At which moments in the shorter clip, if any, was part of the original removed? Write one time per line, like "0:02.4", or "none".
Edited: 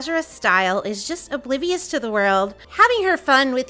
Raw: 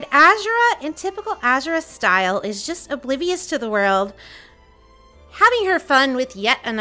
0:02.6